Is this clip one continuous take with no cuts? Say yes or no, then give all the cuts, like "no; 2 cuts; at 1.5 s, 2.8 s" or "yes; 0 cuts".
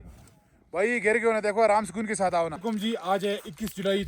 no; 1 cut; at 2.6 s